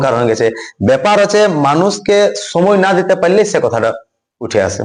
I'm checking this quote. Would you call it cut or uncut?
uncut